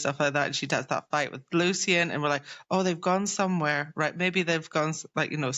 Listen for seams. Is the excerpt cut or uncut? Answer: uncut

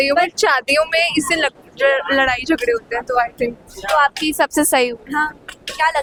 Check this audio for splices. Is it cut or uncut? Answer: uncut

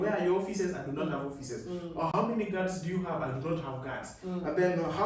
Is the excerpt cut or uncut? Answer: uncut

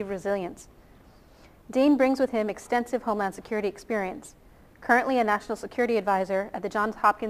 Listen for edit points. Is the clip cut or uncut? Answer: uncut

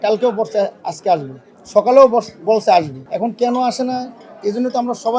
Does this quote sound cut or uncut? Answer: cut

